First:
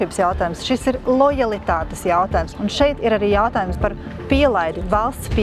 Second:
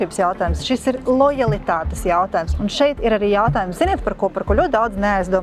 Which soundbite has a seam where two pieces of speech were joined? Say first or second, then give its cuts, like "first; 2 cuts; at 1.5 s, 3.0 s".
first; 1 cut; at 3.8 s